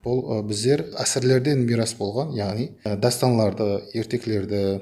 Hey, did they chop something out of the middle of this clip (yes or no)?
yes